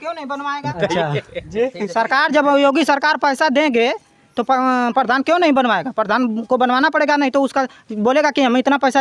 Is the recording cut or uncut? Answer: uncut